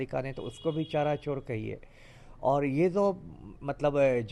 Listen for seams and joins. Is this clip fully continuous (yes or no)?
yes